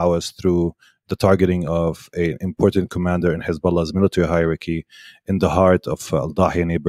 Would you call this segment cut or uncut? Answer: uncut